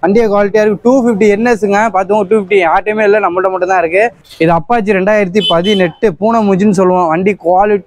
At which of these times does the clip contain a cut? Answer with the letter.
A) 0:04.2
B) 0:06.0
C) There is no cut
A